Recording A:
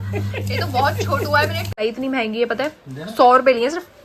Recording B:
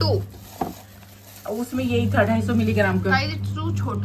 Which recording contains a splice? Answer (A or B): A